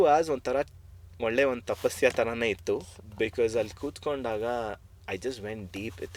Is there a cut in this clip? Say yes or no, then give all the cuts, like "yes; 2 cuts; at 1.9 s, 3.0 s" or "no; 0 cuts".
no; 0 cuts